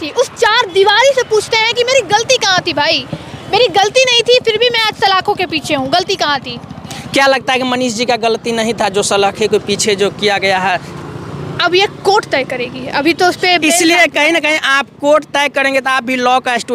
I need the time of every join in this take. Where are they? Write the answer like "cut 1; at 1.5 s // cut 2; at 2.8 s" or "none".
none